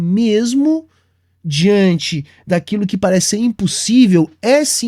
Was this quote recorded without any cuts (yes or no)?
yes